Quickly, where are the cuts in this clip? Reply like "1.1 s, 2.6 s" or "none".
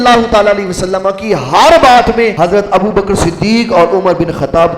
2.3 s